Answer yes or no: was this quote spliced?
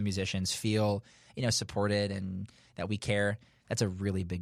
no